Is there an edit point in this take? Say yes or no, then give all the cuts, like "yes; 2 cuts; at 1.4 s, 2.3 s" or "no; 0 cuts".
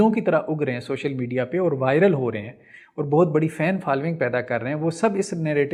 no; 0 cuts